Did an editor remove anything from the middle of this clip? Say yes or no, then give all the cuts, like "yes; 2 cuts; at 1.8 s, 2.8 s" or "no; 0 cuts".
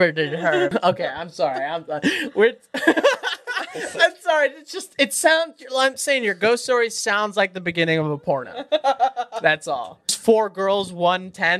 yes; 2 cuts; at 0.7 s, 10.1 s